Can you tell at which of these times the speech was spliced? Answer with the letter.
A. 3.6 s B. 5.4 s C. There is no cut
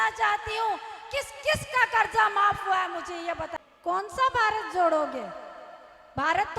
A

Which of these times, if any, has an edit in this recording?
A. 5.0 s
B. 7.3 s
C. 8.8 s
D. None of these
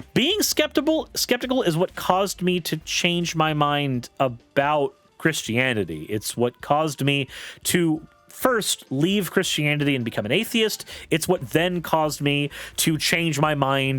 A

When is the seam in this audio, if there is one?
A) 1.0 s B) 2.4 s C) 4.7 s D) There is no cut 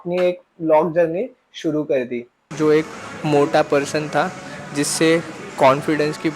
B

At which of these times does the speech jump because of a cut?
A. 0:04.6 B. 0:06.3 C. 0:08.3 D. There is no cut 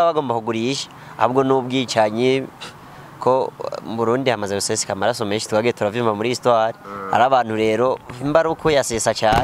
D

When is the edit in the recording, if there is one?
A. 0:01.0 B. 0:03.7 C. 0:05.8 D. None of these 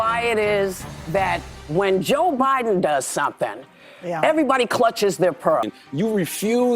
C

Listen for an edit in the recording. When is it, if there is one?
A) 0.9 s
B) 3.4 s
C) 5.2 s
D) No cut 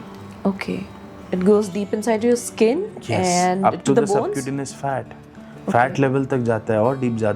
D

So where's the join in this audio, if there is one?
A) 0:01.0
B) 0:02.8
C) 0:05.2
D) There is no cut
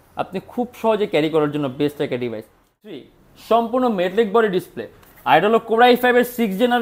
B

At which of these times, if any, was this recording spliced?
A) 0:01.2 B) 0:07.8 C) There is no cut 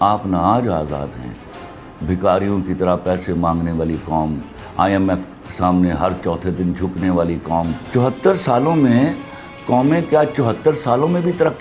B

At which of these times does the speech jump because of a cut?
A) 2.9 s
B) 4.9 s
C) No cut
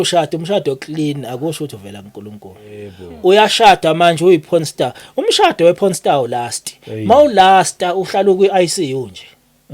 A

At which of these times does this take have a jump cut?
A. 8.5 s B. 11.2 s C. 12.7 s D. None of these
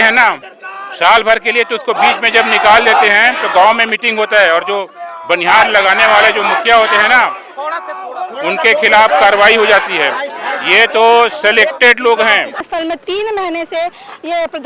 C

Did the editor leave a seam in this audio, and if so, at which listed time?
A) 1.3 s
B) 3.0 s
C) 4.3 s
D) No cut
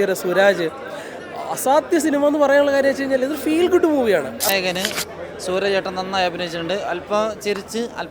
C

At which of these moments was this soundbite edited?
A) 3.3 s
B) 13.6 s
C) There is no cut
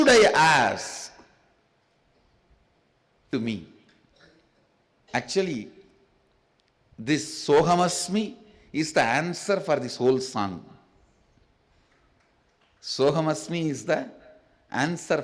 A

